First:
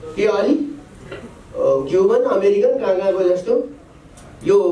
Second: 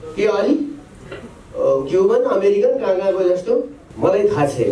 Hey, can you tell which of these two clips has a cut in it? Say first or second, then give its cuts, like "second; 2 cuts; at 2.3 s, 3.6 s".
second; 1 cut; at 3.8 s